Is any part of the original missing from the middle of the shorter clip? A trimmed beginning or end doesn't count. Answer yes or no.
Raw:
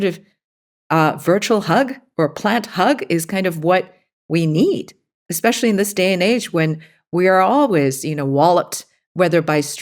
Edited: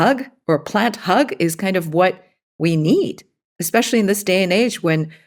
no